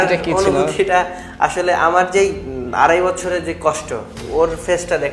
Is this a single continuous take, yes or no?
no